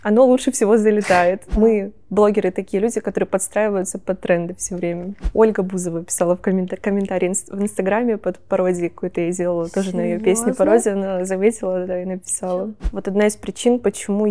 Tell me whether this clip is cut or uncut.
cut